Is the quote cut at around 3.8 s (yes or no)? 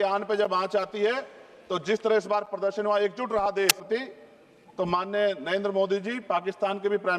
yes